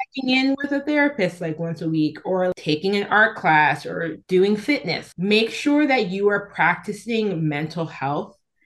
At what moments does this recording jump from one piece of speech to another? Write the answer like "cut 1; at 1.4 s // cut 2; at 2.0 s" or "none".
cut 1; at 2.5 s // cut 2; at 4.2 s // cut 3; at 5.0 s

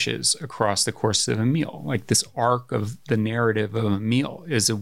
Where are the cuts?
none

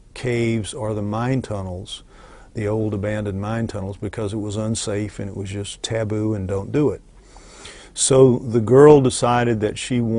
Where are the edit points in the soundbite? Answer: cut 1; at 0.9 s

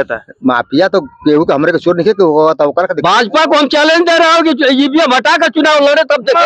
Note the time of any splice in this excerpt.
cut 1; at 3.3 s

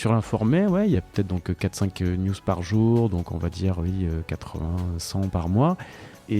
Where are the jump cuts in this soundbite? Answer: cut 1; at 1.0 s

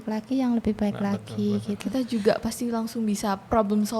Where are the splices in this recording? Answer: none

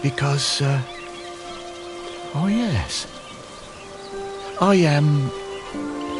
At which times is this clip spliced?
cut 1; at 5.3 s

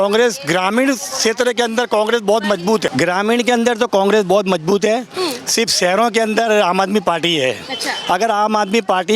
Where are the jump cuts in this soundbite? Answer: cut 1; at 2.9 s

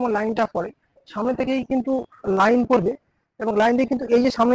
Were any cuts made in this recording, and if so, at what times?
none

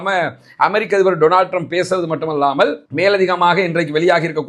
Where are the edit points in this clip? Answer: none

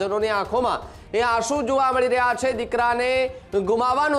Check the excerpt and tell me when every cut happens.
none

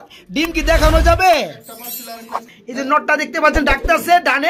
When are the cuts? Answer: cut 1; at 2.5 s

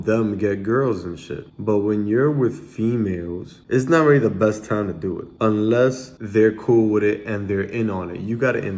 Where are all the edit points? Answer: cut 1; at 3.5 s // cut 2; at 5.2 s // cut 3; at 6.1 s

